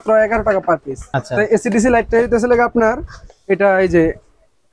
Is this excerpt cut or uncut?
cut